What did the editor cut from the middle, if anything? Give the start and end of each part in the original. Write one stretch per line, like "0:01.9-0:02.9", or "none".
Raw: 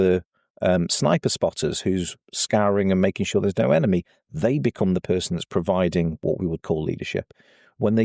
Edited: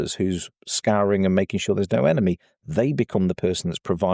none